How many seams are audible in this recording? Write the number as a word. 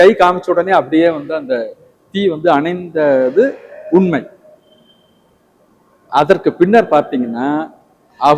zero